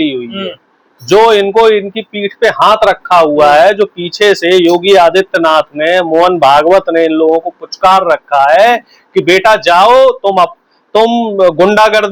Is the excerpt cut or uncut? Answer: uncut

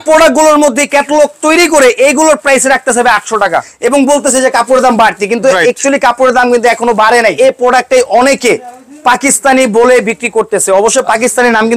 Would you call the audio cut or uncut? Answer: cut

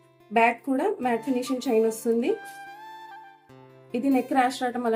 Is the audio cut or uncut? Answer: uncut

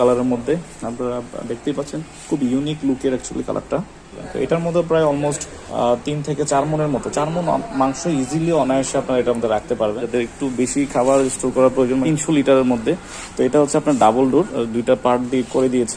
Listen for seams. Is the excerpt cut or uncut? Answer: cut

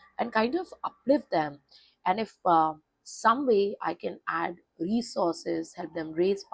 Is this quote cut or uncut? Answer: uncut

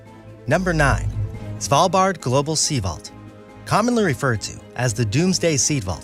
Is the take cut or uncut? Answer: uncut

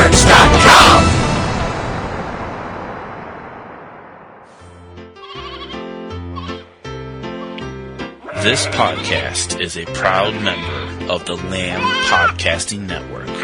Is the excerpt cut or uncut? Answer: cut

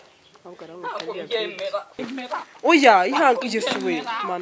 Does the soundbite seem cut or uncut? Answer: cut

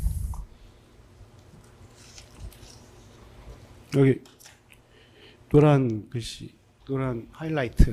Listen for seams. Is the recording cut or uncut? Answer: uncut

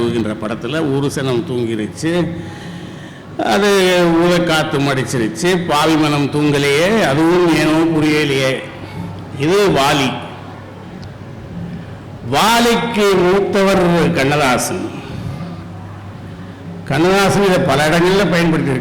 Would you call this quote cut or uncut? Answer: uncut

